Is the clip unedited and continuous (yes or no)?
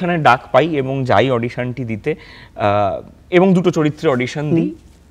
yes